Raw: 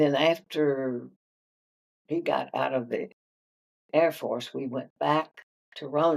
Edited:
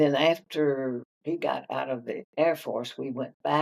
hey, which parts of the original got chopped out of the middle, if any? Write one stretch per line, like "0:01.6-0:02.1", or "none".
0:01.1-0:02.0
0:03.1-0:03.8